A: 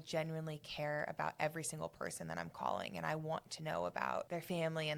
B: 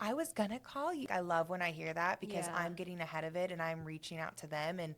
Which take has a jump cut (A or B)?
B